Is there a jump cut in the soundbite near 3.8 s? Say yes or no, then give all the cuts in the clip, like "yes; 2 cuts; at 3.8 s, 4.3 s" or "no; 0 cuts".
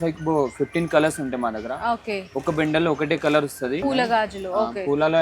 yes; 1 cut; at 3.8 s